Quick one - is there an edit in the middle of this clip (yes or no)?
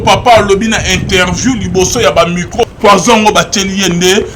yes